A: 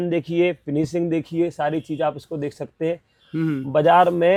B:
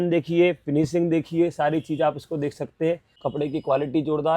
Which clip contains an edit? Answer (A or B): B